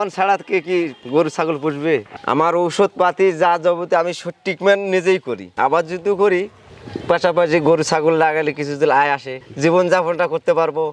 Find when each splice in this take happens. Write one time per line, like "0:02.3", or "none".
0:02.1
0:05.4